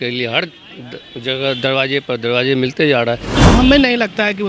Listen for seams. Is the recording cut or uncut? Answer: cut